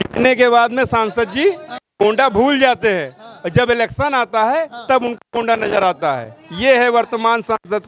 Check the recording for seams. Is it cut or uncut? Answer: uncut